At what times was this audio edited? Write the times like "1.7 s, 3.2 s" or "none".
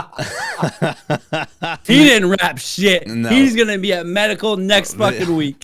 1.8 s